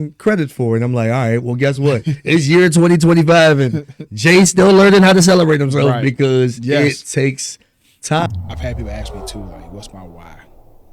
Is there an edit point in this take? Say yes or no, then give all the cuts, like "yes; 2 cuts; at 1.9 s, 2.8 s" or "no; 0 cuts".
yes; 1 cut; at 8.3 s